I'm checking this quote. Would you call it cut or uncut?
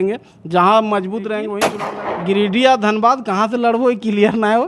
cut